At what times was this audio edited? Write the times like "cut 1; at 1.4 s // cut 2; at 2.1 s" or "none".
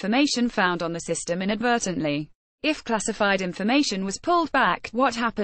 cut 1; at 0.7 s // cut 2; at 2.8 s